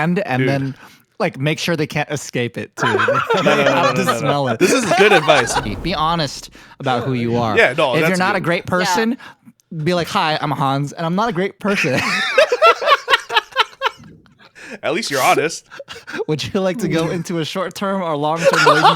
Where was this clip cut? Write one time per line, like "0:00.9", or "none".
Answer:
0:05.6